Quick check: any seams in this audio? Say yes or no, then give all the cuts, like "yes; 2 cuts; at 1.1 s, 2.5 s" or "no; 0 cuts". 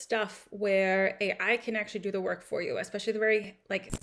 no; 0 cuts